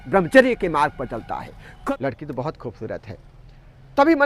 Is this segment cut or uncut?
cut